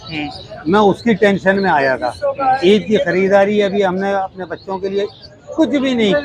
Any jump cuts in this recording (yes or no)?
no